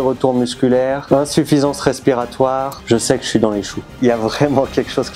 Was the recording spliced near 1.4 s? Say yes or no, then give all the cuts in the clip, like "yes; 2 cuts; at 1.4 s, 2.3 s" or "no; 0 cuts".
no; 1 cut; at 3.9 s